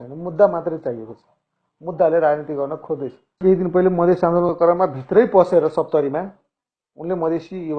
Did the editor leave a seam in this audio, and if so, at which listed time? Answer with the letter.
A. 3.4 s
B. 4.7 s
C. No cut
A